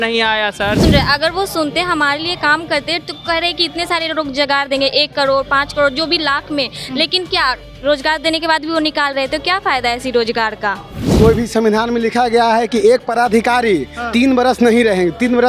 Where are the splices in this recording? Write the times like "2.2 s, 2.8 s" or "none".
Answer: 0.8 s, 11.0 s